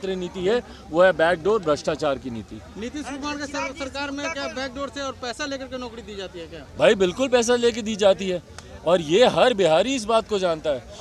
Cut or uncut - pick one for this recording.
uncut